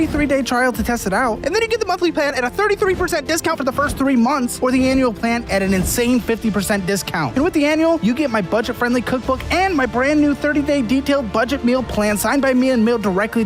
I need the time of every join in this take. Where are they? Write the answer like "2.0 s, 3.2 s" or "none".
none

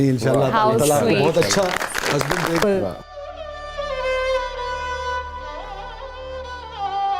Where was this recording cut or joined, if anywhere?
2.6 s

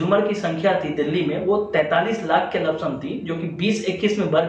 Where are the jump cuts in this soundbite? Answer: none

